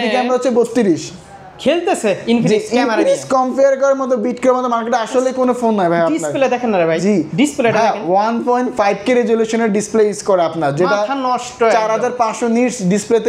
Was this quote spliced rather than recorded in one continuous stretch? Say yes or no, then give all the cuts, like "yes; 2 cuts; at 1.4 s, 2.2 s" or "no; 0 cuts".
no; 0 cuts